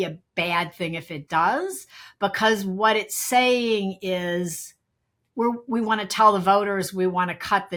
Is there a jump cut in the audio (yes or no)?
no